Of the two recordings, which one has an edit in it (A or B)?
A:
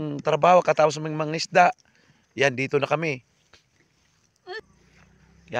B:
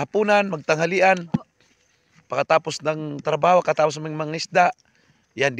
A